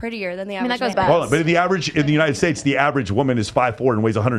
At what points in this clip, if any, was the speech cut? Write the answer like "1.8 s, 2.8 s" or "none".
0.9 s